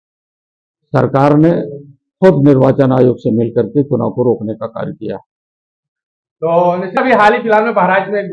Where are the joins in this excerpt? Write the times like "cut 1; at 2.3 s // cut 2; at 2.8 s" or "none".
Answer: cut 1; at 7.0 s